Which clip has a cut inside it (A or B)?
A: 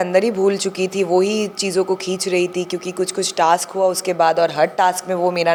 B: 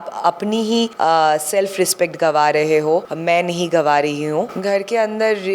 B